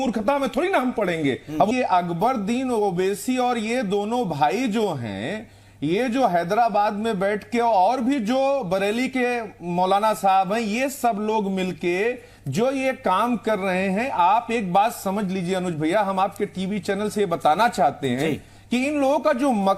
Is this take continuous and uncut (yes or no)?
no